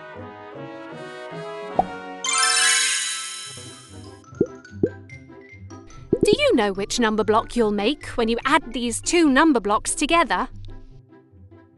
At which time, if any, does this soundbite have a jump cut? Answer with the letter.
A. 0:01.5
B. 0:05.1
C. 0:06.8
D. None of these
D